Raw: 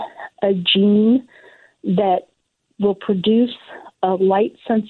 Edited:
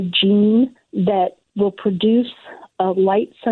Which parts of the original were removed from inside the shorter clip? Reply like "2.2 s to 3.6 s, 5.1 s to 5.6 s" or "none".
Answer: 1.7 s to 2.4 s